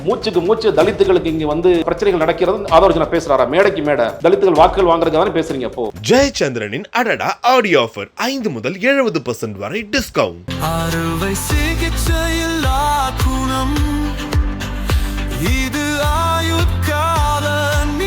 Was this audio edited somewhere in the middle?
yes; 3 cuts; at 1.8 s, 4.1 s, 5.9 s

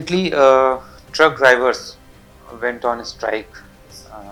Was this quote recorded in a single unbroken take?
yes; 0 cuts

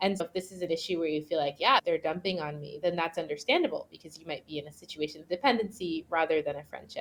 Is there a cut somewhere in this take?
no; 0 cuts

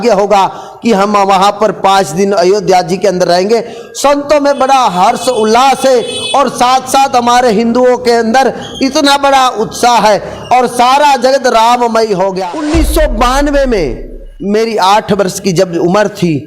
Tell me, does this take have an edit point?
yes; 1 cut; at 12.4 s

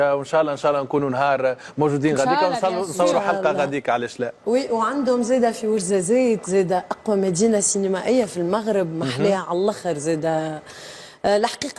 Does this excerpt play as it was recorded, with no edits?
yes; 0 cuts

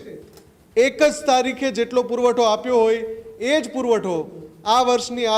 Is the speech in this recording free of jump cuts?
yes; 0 cuts

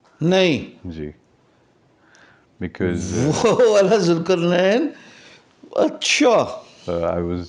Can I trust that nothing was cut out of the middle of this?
yes; 0 cuts

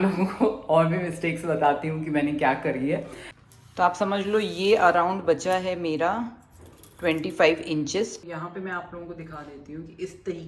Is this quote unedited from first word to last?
no; 2 cuts; at 3.3 s, 8.2 s

